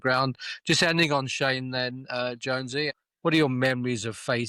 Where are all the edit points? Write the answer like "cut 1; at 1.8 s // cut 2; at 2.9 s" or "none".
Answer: cut 1; at 3.0 s